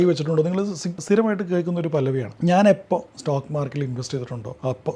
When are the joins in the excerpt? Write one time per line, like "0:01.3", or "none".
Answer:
0:01.0